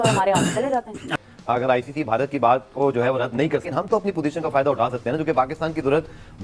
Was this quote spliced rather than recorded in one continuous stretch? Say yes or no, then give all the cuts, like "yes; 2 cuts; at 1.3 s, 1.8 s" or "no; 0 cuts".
yes; 1 cut; at 1.2 s